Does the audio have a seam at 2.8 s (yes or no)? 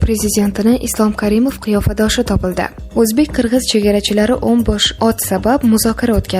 yes